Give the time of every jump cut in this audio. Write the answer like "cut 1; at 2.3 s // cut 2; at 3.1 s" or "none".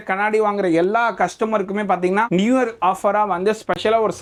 none